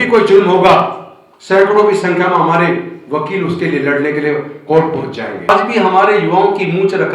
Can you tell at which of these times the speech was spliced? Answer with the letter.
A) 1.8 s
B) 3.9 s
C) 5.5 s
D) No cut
C